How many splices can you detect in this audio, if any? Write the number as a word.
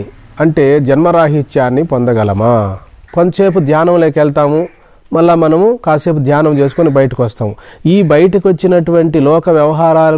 one